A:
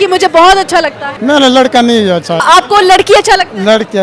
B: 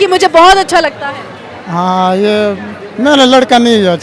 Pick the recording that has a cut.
A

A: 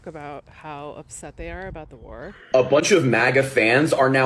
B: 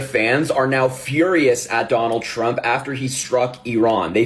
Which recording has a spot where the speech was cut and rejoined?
A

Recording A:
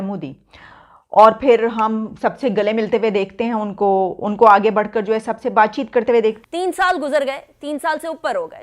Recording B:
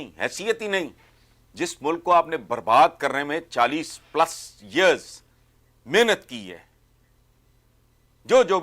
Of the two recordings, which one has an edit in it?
A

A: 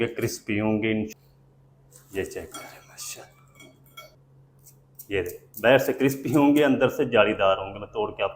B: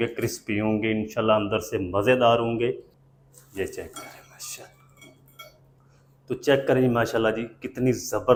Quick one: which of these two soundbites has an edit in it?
A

